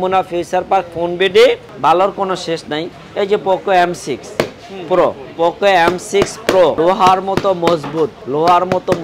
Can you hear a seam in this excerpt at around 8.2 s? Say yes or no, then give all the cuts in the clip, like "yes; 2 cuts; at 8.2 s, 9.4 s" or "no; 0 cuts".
yes; 3 cuts; at 1.7 s, 6.8 s, 8.2 s